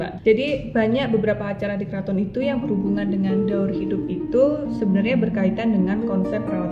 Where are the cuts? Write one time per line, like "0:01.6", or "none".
none